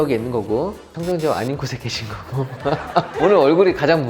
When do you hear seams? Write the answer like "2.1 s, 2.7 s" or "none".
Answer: none